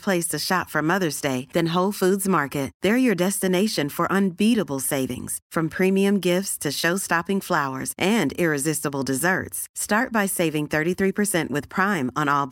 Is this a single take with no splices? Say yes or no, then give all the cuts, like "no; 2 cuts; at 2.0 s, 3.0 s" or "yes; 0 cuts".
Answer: yes; 0 cuts